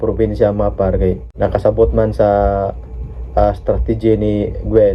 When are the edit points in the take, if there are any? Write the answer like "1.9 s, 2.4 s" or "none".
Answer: 1.3 s